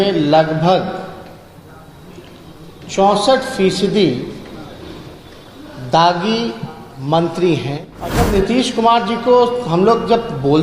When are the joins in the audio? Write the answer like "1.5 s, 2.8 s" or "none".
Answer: 8.3 s